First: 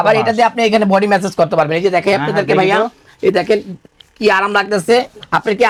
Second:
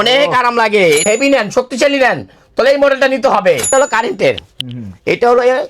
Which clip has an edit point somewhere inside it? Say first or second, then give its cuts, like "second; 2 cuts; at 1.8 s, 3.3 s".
second; 2 cuts; at 1.1 s, 3.7 s